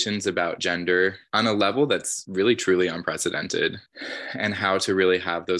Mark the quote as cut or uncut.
cut